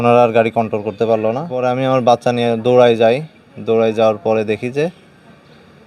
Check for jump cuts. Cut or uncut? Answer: cut